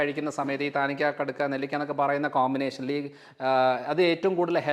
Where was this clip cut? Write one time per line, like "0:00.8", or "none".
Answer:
none

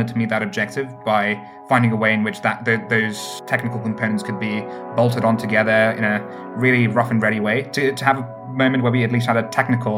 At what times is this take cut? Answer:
none

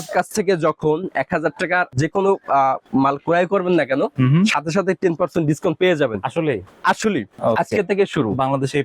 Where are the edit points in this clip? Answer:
0:01.9
0:07.3

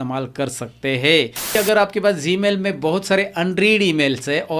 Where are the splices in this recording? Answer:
0:01.5

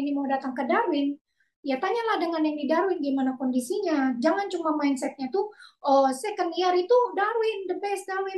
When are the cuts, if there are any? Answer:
none

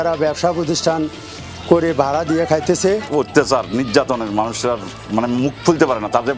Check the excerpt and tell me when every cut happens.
0:03.1

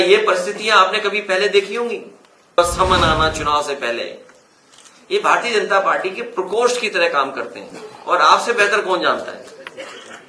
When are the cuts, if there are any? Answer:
0:02.6

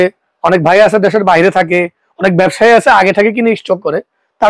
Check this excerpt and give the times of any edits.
none

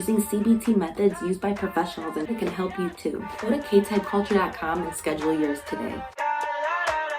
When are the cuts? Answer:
0:06.0

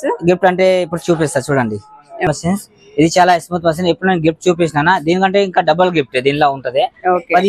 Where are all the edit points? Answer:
0:02.3

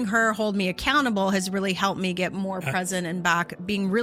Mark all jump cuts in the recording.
none

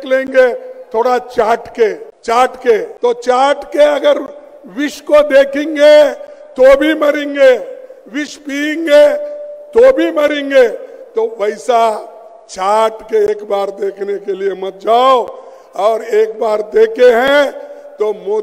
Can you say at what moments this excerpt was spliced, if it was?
0:02.1
0:02.9

